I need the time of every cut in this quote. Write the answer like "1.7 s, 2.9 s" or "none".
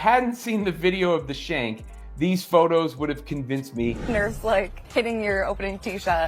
4.3 s